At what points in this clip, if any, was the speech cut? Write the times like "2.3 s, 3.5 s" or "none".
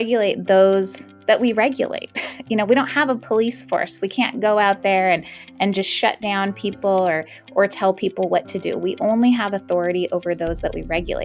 none